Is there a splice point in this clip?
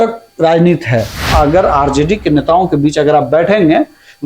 yes; 1 cut; at 1.3 s

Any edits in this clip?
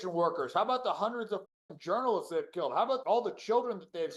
no; 0 cuts

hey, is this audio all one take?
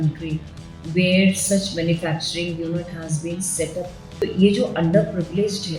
no; 1 cut; at 4.2 s

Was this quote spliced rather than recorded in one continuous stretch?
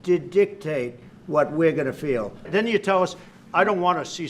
yes; 1 cut; at 2.5 s

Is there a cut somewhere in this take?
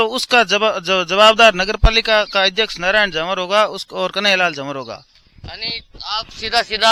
no; 0 cuts

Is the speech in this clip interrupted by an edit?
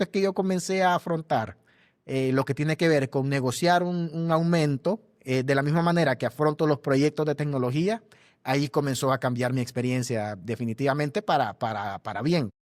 no; 0 cuts

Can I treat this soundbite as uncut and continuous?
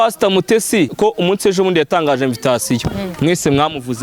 no; 1 cut; at 0.9 s

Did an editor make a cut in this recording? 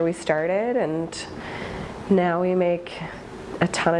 no; 0 cuts

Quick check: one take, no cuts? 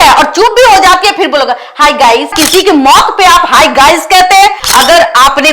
no; 2 cuts; at 2.4 s, 4.6 s

